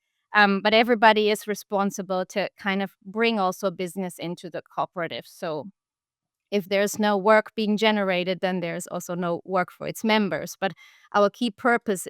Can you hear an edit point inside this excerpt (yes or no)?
no